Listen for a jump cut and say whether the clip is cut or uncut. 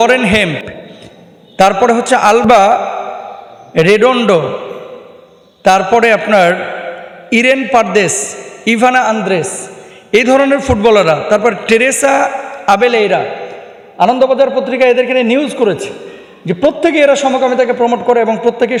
uncut